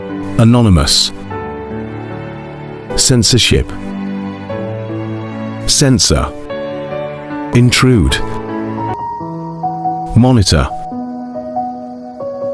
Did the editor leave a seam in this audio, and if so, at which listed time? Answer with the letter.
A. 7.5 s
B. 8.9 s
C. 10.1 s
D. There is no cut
A